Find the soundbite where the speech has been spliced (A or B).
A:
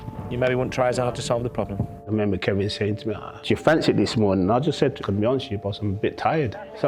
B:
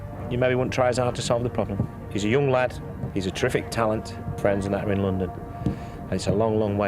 A